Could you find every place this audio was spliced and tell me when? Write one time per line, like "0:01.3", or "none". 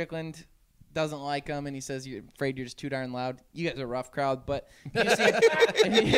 none